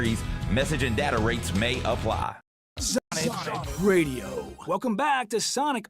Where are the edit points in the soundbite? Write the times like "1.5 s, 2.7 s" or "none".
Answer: 2.5 s